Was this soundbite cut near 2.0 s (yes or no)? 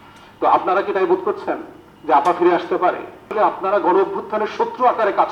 no